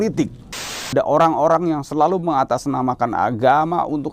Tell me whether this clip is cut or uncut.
cut